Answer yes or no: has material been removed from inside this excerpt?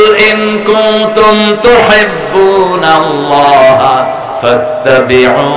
no